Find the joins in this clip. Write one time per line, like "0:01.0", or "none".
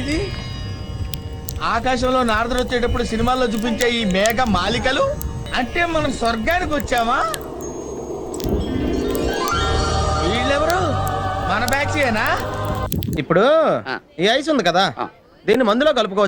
0:05.3